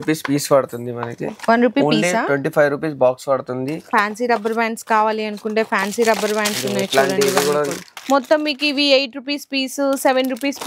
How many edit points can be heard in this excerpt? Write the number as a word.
two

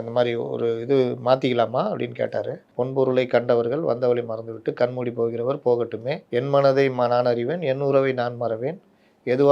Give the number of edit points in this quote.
two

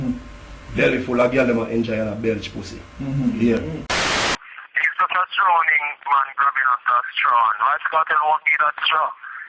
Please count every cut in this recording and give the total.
one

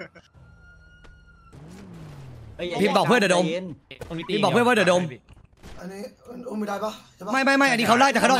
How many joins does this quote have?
one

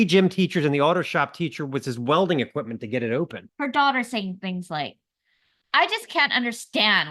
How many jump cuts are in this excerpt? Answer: one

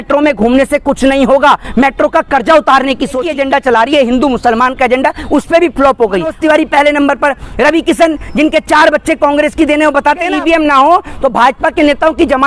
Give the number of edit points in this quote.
three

